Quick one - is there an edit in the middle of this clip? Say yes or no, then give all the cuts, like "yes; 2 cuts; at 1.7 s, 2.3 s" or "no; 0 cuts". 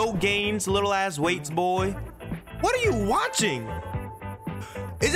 no; 0 cuts